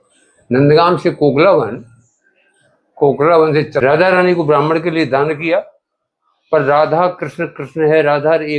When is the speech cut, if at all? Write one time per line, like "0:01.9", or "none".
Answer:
0:03.8